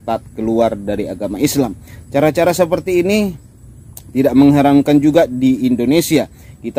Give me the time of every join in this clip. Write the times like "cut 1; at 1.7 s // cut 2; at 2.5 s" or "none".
none